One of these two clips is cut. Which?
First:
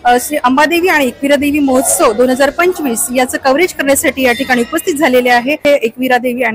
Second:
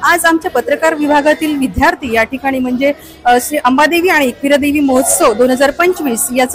first; 1 cut; at 5.6 s

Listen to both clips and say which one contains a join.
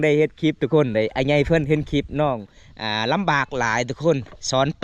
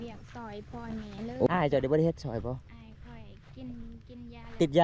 second; 1 cut; at 1.5 s

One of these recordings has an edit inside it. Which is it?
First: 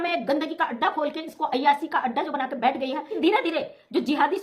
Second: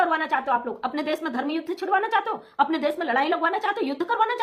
first; 1 cut; at 3.1 s

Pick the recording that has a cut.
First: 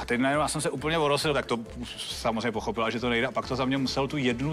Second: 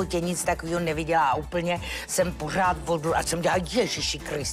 first; 1 cut; at 1.3 s

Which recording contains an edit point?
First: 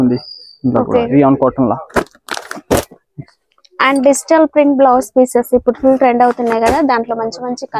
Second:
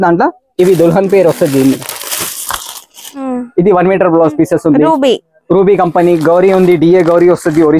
second; 1 cut; at 3.4 s

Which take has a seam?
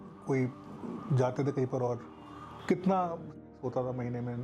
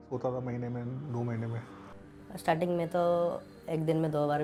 first; 1 cut; at 2.6 s

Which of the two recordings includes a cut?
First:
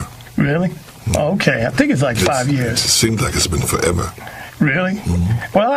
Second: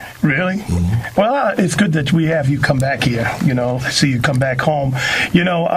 second; 1 cut; at 3.8 s

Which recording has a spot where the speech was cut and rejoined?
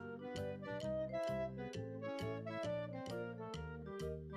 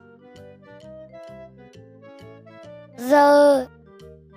second; 1 cut; at 2.9 s

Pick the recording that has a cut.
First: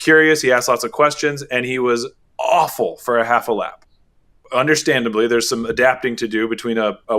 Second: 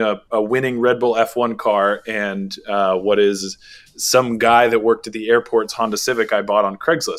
first; 2 cuts; at 2.2 s, 4.2 s

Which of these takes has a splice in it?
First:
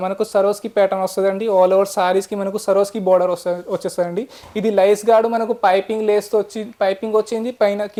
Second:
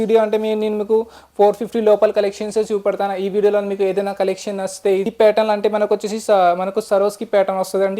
second; 1 cut; at 5.1 s

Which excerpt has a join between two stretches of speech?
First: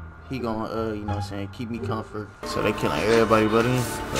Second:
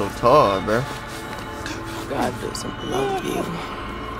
first; 1 cut; at 2.5 s

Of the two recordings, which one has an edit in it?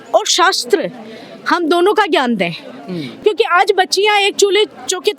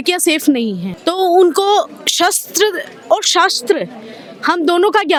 first; 1 cut; at 3.2 s

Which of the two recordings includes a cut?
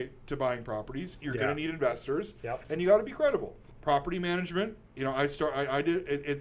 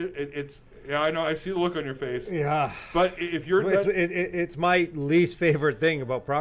first; 1 cut; at 3.7 s

